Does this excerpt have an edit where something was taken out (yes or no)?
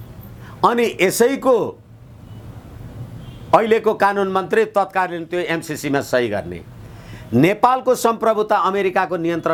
no